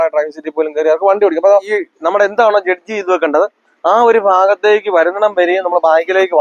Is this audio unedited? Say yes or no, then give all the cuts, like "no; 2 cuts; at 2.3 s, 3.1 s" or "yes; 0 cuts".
no; 1 cut; at 1.7 s